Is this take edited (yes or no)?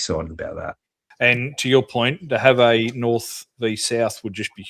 yes